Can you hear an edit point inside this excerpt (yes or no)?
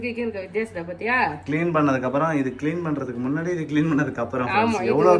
no